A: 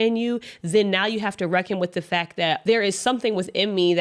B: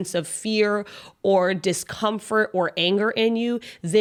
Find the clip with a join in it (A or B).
A